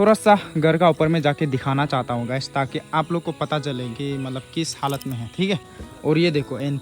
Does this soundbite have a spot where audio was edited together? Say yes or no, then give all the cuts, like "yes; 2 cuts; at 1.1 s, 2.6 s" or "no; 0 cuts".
yes; 1 cut; at 5.8 s